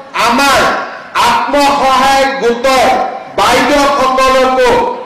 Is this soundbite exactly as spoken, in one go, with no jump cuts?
yes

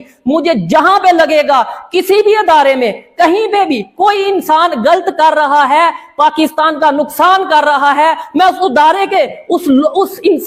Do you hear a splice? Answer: no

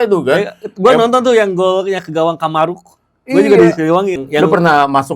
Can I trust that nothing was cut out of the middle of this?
no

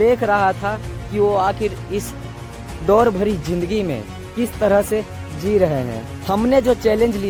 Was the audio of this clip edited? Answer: no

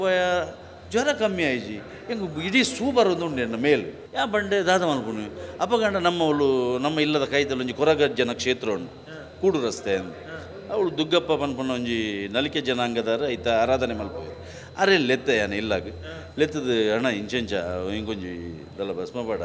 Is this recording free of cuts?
no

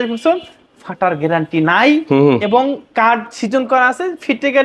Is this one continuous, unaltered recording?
yes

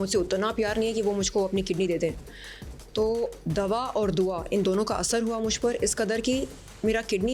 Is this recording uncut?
yes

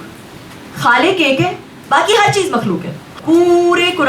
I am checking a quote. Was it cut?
yes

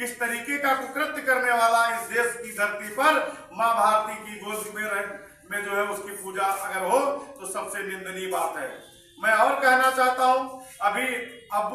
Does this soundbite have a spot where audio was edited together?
no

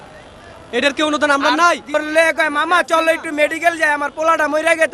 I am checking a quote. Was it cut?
yes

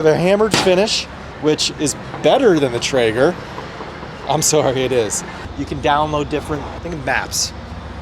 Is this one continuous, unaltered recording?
no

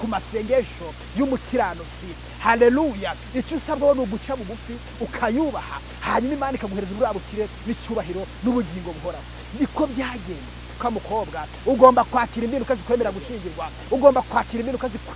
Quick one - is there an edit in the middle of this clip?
yes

